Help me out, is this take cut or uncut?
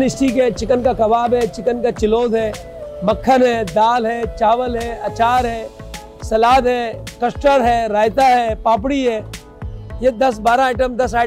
uncut